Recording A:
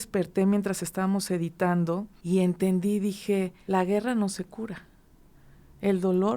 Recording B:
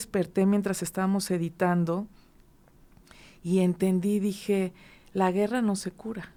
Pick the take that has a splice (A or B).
A